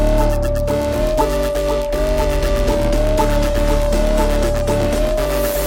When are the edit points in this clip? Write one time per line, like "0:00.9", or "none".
none